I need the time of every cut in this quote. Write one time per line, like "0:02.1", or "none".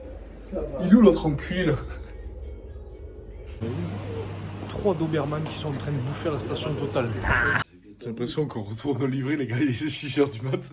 0:03.6
0:07.7